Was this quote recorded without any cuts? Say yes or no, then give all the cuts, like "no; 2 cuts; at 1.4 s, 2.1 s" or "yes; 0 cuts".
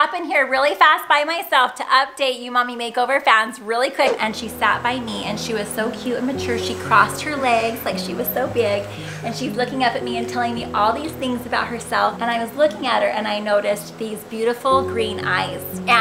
no; 1 cut; at 4.1 s